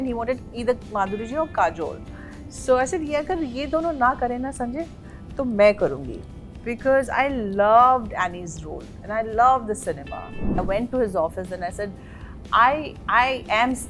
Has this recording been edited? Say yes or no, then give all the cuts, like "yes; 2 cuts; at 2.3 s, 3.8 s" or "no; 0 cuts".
yes; 1 cut; at 10.6 s